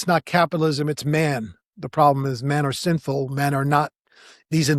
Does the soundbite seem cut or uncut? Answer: uncut